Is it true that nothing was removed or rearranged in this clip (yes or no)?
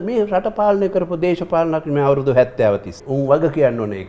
no